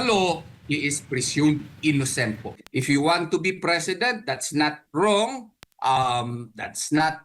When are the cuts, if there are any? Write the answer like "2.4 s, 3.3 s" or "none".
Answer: 2.6 s